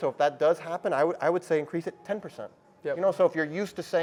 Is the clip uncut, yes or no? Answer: yes